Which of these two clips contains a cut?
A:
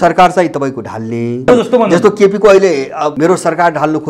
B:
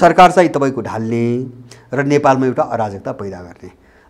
A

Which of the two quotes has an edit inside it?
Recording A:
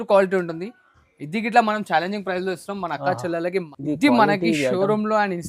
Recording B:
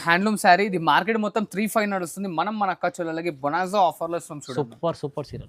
A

